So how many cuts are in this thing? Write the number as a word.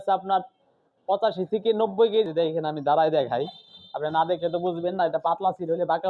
one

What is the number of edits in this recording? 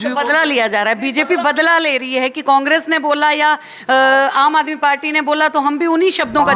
zero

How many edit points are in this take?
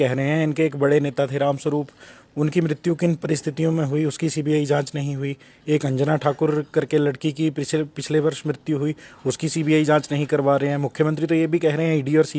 zero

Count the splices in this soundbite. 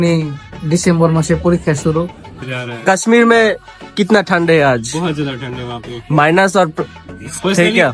one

